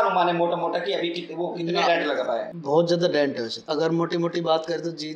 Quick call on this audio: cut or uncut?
cut